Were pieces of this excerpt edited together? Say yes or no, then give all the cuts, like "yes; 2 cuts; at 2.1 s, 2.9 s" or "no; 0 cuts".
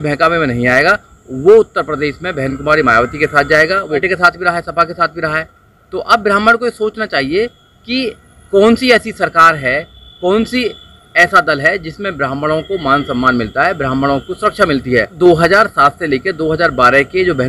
yes; 2 cuts; at 4.0 s, 15.2 s